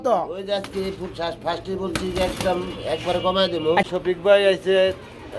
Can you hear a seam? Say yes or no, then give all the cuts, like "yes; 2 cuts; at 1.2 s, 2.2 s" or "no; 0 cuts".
yes; 1 cut; at 3.9 s